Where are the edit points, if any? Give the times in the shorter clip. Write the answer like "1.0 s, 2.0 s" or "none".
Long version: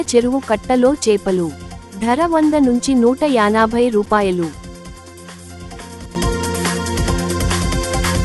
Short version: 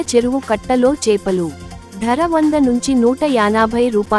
none